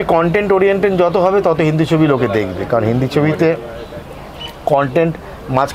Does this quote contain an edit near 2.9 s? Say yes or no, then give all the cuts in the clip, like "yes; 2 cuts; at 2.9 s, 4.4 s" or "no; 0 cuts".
no; 0 cuts